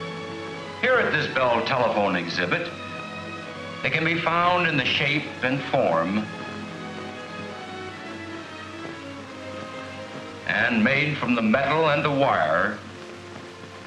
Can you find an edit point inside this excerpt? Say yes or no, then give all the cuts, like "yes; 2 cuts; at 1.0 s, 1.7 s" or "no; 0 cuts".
yes; 1 cut; at 6.0 s